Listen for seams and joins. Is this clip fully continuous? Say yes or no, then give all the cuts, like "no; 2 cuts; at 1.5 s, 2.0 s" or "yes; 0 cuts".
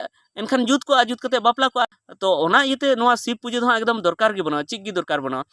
no; 1 cut; at 2.0 s